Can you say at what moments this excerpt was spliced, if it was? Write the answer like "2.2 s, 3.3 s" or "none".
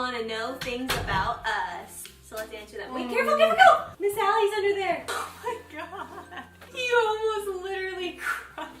3.9 s, 6.6 s

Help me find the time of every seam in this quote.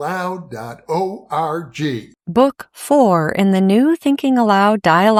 none

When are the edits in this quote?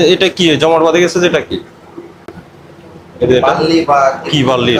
none

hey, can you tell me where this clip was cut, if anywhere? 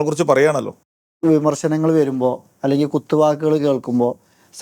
1.0 s

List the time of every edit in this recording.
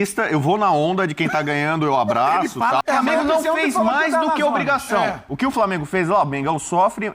2.8 s

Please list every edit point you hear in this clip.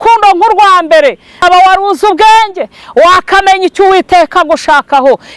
1.4 s

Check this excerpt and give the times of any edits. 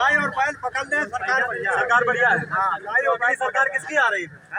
none

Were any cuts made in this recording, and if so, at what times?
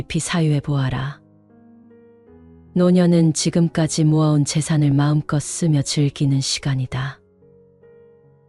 1.2 s, 2.7 s

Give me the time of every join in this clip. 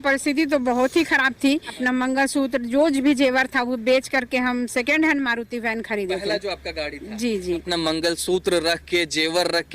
1.7 s, 7.6 s

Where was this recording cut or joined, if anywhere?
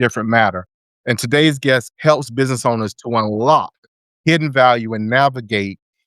1.9 s

